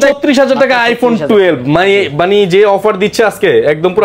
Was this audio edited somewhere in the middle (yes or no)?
no